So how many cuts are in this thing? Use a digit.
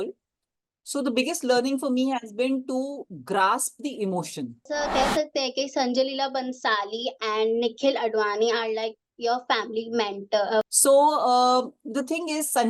2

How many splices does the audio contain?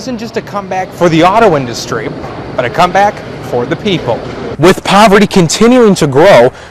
1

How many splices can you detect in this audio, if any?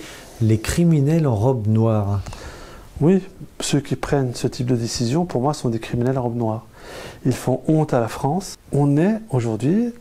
1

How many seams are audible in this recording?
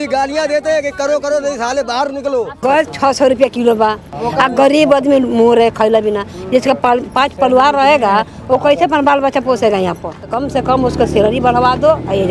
3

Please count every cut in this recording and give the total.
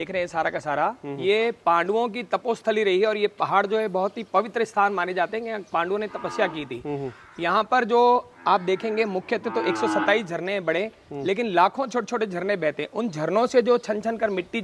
0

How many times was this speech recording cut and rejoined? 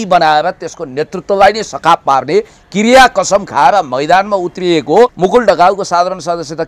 1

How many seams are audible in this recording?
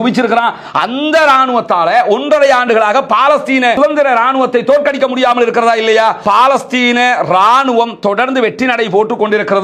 2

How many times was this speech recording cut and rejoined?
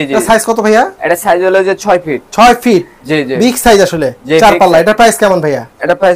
0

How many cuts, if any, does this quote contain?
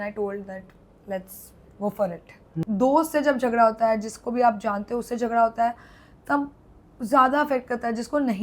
1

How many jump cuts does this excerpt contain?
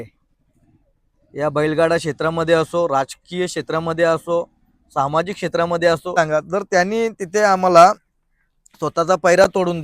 1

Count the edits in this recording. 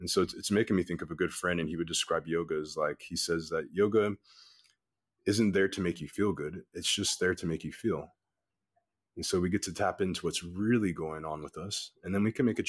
0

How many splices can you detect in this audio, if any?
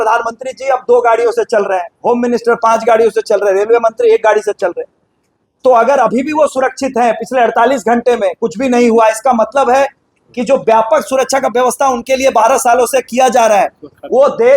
0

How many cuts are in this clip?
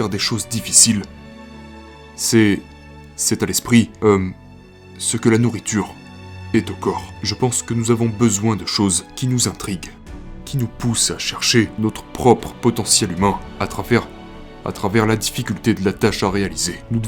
0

